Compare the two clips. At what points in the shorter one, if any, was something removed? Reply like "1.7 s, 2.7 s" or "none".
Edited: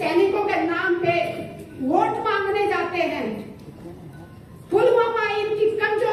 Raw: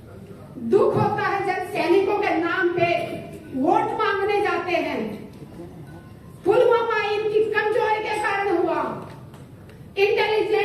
none